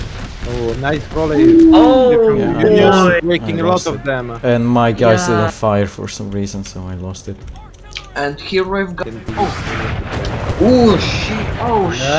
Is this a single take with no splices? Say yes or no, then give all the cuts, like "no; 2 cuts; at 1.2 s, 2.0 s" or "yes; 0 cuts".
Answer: no; 1 cut; at 9.0 s